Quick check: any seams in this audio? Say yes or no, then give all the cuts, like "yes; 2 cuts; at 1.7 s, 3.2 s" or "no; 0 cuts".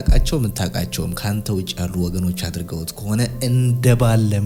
no; 0 cuts